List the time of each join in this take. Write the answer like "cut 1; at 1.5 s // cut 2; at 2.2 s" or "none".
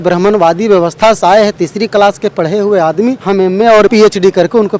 cut 1; at 3.2 s // cut 2; at 3.9 s